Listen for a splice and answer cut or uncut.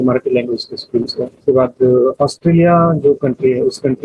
cut